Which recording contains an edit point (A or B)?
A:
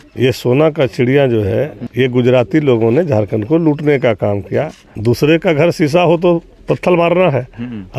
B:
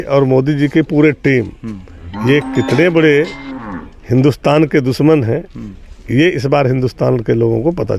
A